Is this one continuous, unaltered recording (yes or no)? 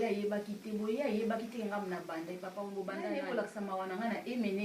no